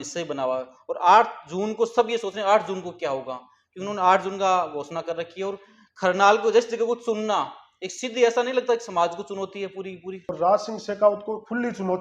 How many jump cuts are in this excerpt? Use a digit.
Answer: 1